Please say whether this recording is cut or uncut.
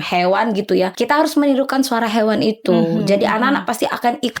cut